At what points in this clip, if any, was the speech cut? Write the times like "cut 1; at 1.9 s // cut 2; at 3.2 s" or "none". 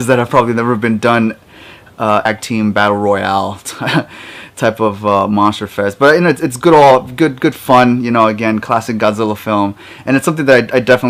none